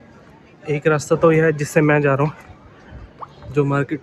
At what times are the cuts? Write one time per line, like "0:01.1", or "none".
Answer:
none